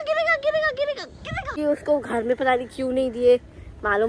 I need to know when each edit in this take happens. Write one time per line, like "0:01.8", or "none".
0:01.6

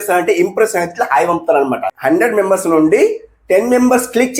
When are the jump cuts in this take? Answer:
0:01.9

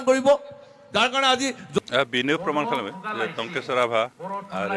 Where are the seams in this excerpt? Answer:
0:01.8

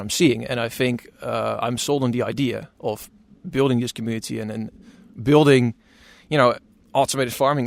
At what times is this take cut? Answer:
none

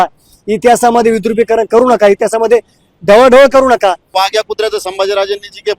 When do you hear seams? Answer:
0:04.1

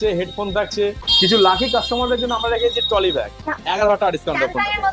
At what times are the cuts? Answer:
0:01.0
0:03.4

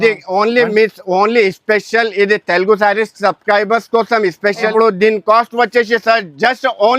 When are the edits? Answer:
0:04.7

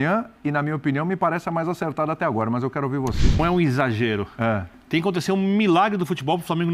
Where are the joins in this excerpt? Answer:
0:03.4

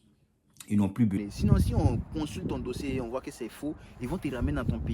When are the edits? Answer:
0:01.2

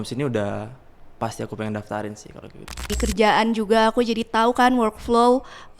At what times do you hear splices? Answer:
0:02.9

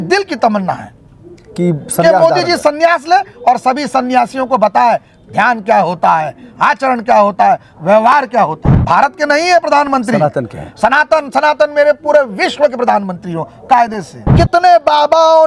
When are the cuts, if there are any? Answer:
0:08.7
0:14.2

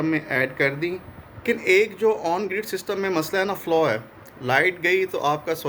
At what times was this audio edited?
0:01.3

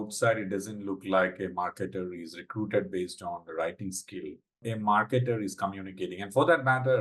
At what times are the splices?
0:04.6

